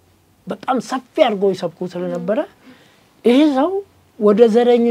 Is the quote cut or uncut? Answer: uncut